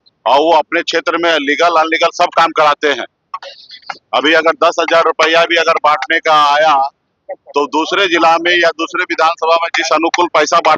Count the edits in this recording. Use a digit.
0